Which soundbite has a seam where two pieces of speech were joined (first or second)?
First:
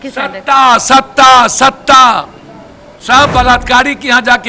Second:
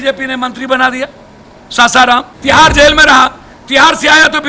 second